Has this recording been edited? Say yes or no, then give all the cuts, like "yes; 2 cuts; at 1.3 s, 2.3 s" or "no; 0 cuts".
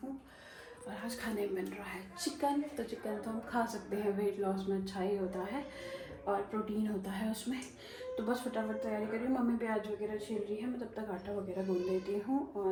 no; 0 cuts